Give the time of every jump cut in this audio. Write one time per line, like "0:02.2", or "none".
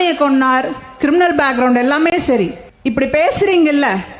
0:02.7